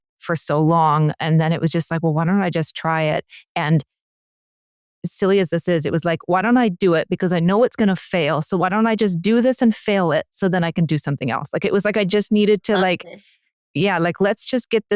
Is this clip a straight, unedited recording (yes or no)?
yes